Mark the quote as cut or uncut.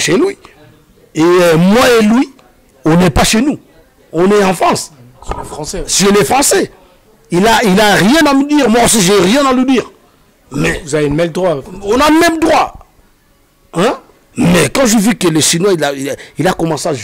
uncut